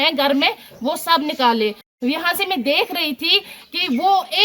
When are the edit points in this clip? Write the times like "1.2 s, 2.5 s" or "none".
1.9 s